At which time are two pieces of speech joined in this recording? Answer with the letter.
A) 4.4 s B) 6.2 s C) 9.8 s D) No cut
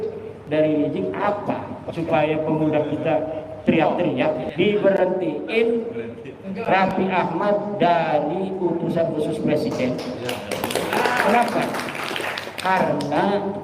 A